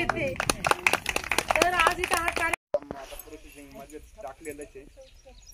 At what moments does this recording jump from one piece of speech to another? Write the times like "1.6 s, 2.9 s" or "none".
2.6 s